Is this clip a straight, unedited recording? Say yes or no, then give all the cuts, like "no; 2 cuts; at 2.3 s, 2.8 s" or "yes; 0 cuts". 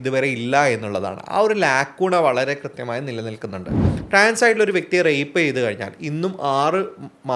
no; 1 cut; at 3.9 s